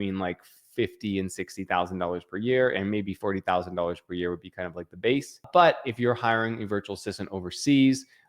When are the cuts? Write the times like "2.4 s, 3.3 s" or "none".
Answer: 5.5 s